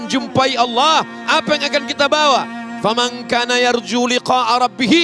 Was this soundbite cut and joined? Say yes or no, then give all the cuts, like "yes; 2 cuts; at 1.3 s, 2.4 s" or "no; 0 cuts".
no; 0 cuts